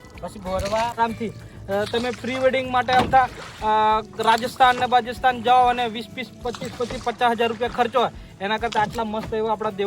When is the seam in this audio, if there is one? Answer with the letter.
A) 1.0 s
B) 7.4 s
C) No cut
A